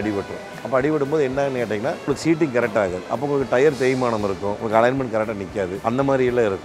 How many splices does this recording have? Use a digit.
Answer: 3